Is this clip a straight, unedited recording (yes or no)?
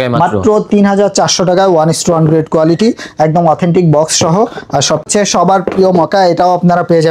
no